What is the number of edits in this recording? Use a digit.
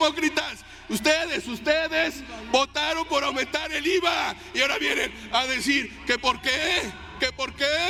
0